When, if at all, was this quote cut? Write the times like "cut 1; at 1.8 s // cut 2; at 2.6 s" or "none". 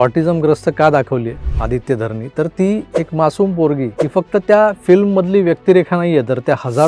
cut 1; at 1.5 s // cut 2; at 2.9 s // cut 3; at 4.0 s